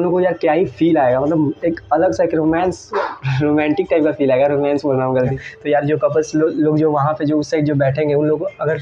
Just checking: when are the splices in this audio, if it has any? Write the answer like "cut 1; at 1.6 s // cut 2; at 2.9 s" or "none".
cut 1; at 5.3 s